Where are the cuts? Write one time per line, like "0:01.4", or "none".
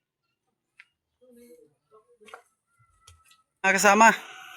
0:03.5